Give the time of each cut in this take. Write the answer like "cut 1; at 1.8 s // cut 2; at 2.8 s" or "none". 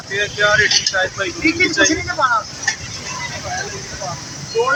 none